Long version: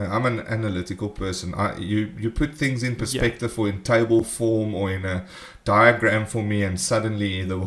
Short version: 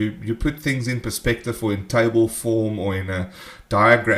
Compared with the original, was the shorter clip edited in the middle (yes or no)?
no